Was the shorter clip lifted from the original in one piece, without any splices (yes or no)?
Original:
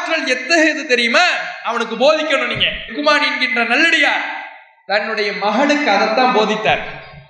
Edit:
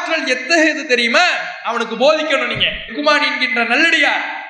yes